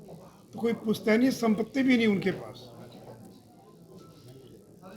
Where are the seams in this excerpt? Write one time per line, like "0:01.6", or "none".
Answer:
0:03.7